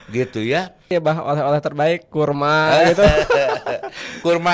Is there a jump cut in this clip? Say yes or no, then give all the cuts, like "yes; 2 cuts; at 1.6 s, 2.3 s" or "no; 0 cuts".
yes; 1 cut; at 0.9 s